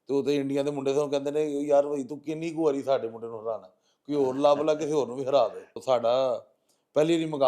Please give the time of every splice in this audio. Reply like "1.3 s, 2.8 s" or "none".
5.8 s